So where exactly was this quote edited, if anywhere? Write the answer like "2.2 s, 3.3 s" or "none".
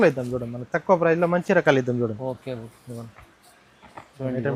none